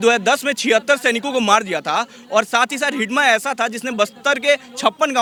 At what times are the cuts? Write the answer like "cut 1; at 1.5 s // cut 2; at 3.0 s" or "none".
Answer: none